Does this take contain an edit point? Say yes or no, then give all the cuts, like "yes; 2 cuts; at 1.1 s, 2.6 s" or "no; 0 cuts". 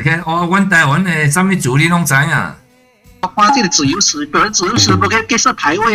yes; 1 cut; at 3.2 s